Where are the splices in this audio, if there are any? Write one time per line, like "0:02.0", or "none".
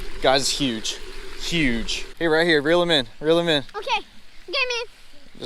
0:02.0